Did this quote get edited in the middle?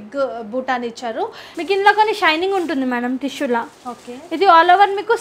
yes; 1 cut; at 1.4 s

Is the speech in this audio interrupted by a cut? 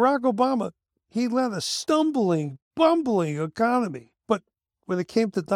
yes; 1 cut; at 4.1 s

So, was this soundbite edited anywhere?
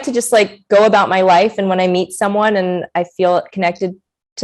no; 0 cuts

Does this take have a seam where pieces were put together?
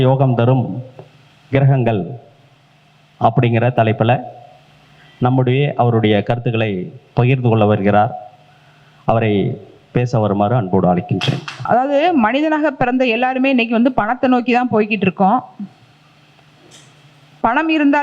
yes; 1 cut; at 11.5 s

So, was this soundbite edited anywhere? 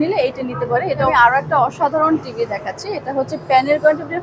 yes; 1 cut; at 1.1 s

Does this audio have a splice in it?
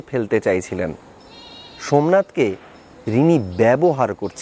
no; 0 cuts

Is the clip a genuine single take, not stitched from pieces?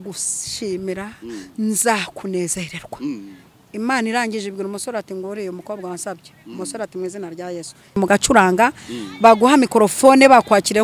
no; 1 cut; at 8.0 s

